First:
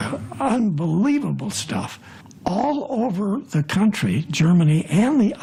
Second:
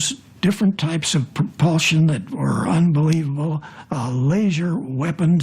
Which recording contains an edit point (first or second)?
second